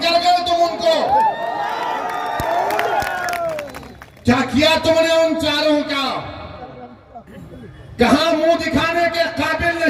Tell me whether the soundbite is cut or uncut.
uncut